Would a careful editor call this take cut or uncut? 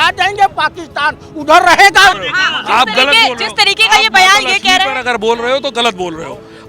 cut